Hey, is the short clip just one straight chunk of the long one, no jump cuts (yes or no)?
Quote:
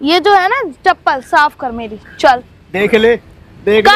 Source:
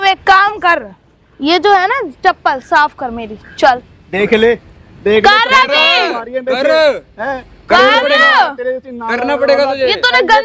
yes